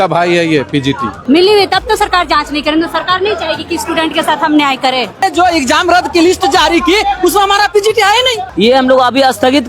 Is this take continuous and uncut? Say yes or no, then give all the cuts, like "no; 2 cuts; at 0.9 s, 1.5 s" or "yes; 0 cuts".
no; 3 cuts; at 1.1 s, 5.2 s, 8.4 s